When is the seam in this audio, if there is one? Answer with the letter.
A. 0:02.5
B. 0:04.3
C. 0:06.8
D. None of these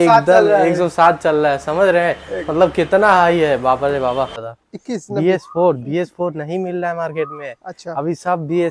B